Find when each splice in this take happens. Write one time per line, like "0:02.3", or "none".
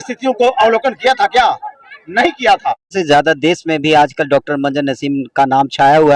0:02.9